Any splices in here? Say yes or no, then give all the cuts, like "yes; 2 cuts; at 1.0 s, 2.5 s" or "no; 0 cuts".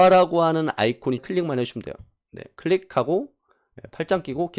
yes; 1 cut; at 1.2 s